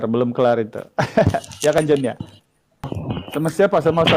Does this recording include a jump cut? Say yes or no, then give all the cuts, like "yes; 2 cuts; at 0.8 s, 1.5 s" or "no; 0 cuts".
yes; 1 cut; at 2.9 s